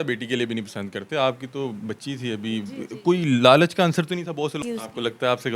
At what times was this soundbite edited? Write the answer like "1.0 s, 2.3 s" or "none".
4.6 s